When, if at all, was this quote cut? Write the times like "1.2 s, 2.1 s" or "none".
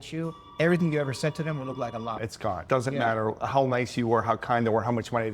none